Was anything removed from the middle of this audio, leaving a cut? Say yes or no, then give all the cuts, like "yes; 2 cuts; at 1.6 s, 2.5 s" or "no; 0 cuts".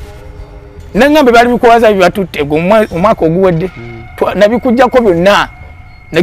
no; 0 cuts